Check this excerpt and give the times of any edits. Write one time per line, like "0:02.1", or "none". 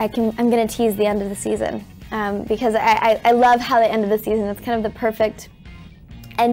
none